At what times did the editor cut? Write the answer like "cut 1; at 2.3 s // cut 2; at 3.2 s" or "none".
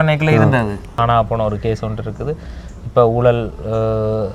cut 1; at 0.9 s